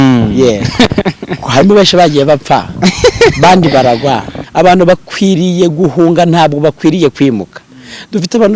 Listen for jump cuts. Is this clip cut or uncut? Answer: cut